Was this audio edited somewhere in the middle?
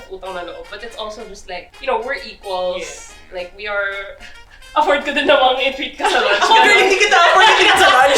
yes; 1 cut; at 1.7 s

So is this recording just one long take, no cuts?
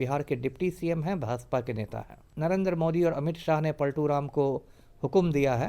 no; 1 cut; at 2.2 s

